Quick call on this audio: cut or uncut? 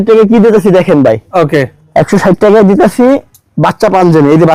uncut